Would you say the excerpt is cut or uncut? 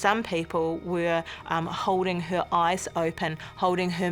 uncut